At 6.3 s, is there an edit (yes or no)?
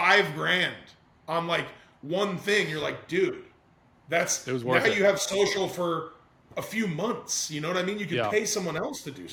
no